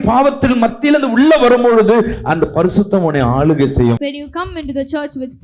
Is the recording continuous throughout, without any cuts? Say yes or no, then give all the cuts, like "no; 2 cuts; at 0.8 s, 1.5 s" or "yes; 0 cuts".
yes; 0 cuts